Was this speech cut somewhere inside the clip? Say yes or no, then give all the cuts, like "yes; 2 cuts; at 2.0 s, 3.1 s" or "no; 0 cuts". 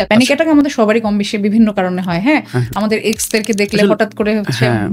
no; 0 cuts